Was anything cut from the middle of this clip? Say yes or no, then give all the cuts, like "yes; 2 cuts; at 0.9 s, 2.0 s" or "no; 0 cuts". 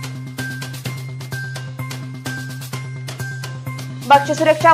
no; 0 cuts